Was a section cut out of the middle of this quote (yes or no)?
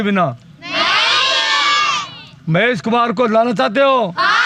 no